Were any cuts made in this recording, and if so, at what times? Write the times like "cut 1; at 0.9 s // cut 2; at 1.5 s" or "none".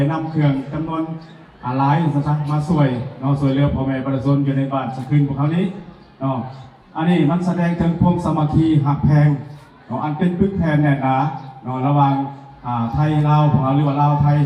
none